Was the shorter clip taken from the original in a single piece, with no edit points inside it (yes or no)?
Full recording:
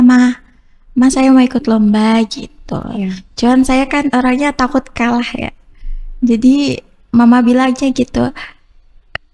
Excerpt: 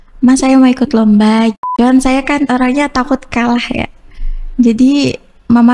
no